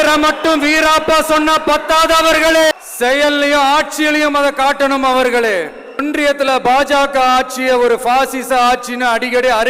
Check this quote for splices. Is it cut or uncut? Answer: cut